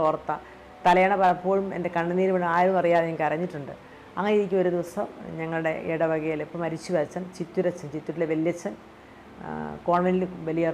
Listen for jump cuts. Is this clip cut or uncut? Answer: uncut